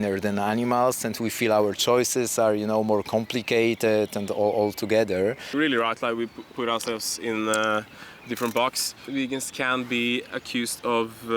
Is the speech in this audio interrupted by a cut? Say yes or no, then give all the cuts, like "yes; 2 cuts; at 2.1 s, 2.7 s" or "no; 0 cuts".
yes; 2 cuts; at 5.5 s, 9.0 s